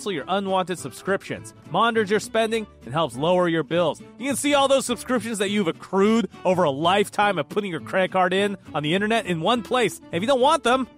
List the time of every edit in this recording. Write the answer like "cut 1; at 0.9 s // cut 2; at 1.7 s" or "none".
none